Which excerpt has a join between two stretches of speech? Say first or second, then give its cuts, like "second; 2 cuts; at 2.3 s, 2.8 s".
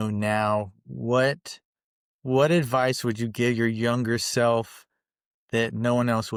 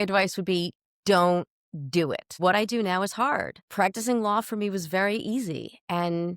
second; 2 cuts; at 2.3 s, 3.6 s